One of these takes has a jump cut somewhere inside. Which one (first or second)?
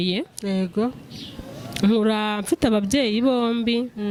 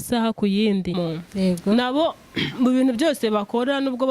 second